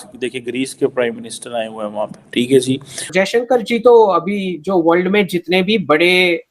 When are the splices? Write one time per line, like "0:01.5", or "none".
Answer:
0:03.1